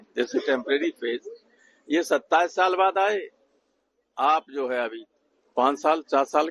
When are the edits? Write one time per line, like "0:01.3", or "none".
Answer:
none